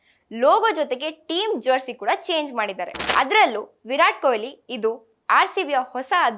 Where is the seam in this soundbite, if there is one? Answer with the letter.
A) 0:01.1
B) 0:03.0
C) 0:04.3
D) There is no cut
B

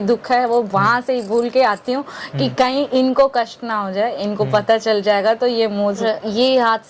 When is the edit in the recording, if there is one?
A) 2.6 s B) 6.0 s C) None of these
B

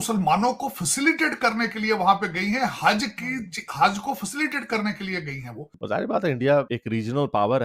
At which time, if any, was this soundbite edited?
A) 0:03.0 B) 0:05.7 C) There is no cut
B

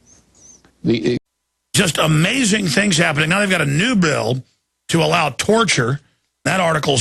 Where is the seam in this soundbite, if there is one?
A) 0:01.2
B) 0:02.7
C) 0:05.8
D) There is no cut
D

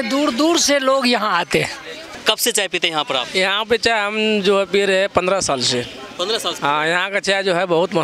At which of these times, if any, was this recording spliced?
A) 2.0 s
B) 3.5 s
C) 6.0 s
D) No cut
A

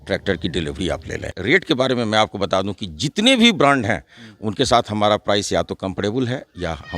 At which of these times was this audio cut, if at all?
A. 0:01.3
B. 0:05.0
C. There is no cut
A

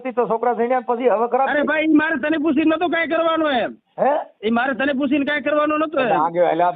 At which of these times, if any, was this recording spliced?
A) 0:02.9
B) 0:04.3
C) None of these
B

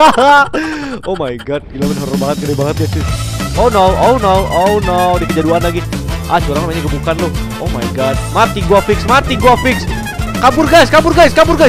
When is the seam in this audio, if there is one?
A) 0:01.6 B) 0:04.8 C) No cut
C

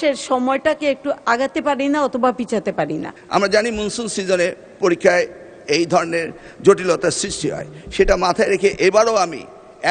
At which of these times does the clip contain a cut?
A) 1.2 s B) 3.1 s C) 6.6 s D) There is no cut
B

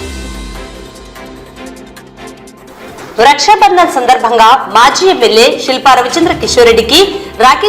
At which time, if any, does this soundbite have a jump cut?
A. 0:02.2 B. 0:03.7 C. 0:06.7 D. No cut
A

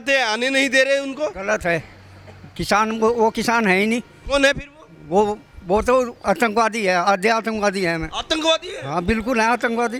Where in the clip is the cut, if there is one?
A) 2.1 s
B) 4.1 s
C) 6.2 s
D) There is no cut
D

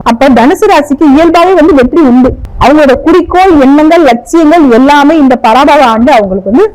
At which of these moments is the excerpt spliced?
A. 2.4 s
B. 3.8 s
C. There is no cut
A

